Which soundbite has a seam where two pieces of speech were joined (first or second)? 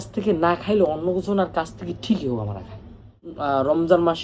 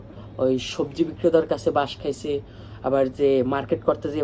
first